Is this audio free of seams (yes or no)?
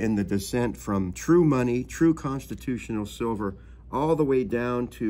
no